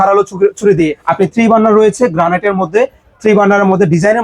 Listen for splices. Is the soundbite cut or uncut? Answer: cut